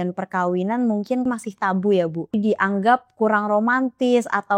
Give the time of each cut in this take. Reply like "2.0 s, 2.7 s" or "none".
1.2 s, 2.4 s